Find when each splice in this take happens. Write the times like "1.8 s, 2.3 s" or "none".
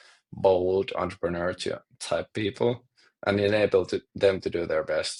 none